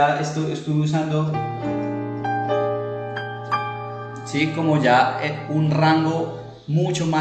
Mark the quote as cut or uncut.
uncut